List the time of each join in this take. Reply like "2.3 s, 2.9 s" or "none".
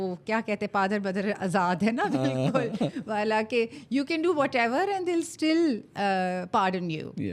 none